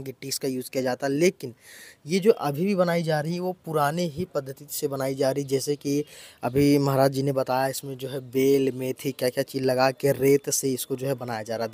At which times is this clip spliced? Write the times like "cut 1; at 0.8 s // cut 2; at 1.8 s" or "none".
none